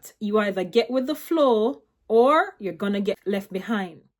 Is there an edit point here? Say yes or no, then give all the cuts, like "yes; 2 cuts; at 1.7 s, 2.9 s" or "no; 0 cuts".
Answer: yes; 1 cut; at 3.2 s